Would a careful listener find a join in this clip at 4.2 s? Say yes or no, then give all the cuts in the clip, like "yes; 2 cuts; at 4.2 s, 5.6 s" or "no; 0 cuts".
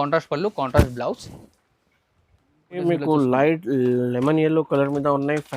no; 1 cut; at 2.8 s